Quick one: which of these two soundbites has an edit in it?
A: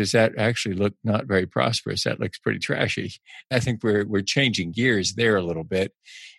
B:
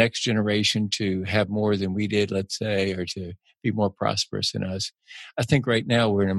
A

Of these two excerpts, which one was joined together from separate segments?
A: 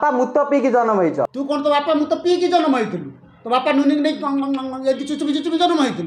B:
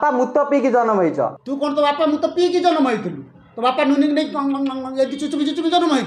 A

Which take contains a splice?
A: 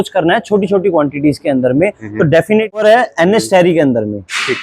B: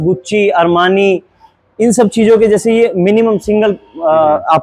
A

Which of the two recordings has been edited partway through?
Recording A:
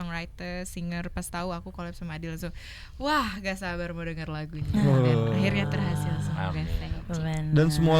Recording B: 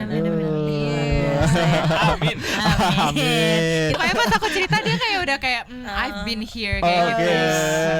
B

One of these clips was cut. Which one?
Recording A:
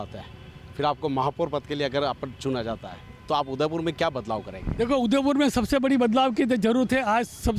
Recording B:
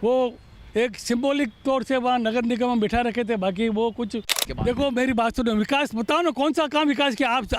B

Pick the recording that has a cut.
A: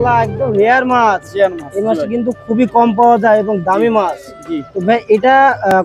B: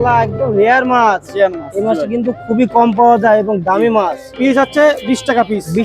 B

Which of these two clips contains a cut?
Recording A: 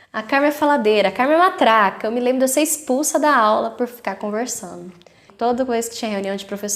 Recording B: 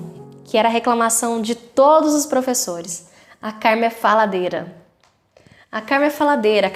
A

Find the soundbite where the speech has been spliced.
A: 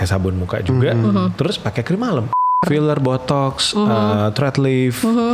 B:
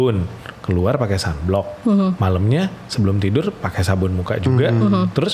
A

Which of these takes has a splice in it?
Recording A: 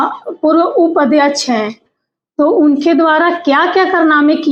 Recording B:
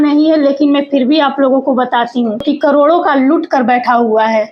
B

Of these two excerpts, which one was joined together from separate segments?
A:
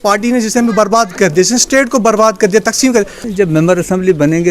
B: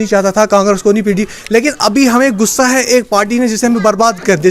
A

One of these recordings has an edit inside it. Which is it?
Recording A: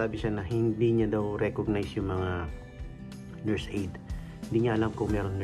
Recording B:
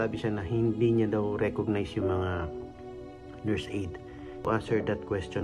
B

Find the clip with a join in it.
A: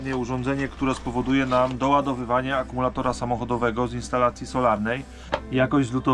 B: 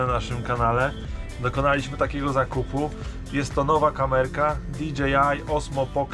A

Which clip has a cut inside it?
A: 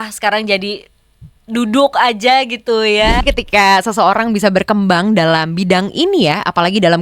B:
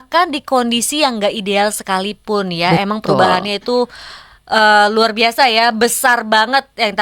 A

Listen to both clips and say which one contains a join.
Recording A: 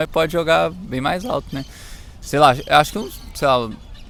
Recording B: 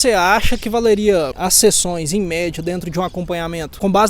B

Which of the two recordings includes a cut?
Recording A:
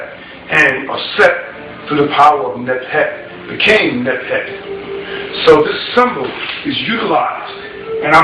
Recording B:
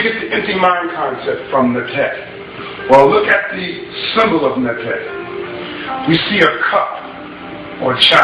A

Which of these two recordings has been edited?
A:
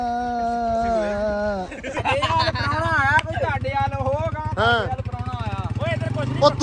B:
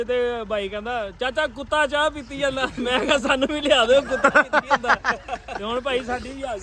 A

